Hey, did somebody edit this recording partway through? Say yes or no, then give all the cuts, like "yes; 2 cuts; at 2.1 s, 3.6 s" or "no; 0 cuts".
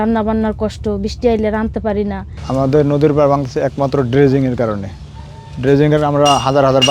no; 0 cuts